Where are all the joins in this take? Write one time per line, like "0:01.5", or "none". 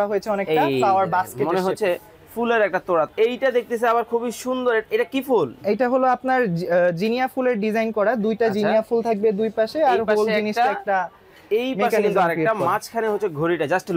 0:03.1